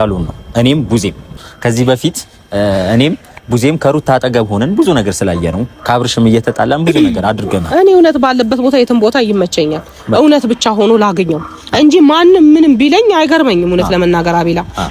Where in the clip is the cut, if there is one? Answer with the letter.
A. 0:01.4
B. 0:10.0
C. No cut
A